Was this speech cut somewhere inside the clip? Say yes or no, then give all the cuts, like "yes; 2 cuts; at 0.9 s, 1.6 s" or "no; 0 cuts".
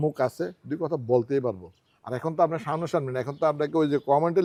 no; 0 cuts